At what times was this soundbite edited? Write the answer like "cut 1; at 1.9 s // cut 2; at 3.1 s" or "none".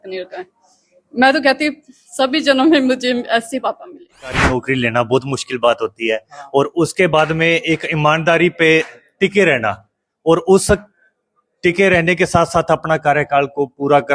cut 1; at 4.4 s